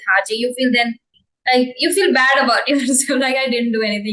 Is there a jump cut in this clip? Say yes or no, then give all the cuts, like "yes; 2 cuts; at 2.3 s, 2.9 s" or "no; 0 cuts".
no; 0 cuts